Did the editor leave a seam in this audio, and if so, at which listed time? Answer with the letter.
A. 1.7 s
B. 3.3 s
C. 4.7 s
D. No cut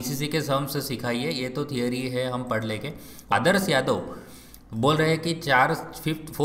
B